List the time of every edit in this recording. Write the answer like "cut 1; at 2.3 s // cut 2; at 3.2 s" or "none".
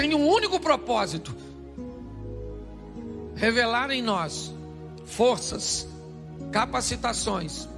cut 1; at 1.2 s // cut 2; at 2.7 s